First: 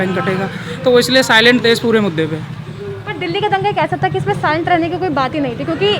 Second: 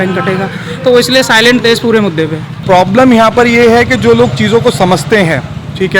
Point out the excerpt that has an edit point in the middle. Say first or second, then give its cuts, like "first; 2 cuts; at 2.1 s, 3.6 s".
second; 1 cut; at 2.5 s